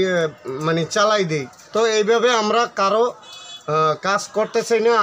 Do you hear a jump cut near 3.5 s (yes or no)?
no